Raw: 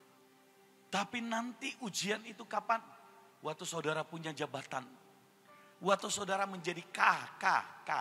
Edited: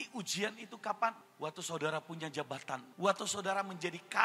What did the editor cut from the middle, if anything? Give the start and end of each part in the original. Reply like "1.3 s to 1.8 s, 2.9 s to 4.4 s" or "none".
2.9 s to 3.3 s, 4.9 s to 5.7 s